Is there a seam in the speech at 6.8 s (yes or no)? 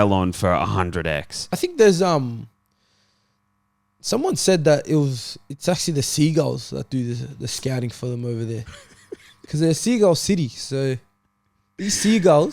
no